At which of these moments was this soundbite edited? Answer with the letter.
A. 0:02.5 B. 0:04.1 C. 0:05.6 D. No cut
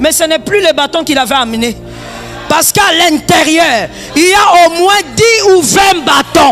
D